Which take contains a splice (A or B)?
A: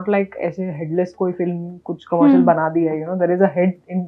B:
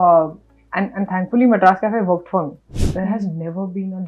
B